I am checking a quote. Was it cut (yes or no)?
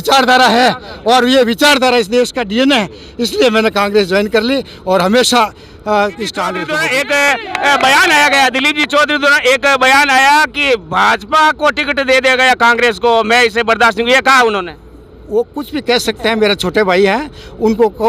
yes